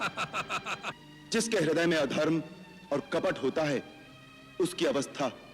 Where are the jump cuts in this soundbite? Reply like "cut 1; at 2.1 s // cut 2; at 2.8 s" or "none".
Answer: cut 1; at 1.0 s